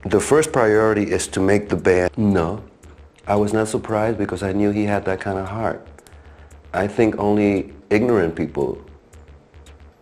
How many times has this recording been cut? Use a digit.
1